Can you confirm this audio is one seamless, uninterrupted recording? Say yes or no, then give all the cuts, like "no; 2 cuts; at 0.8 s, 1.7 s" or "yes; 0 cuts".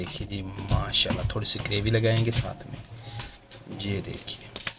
yes; 0 cuts